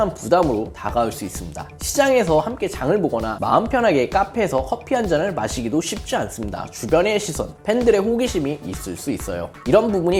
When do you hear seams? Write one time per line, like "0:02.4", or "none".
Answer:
none